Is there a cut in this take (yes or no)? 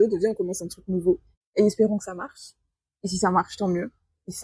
yes